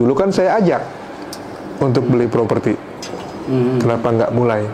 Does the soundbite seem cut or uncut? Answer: uncut